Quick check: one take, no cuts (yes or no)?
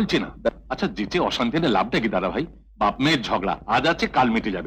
yes